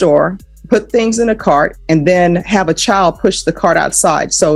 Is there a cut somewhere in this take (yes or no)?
no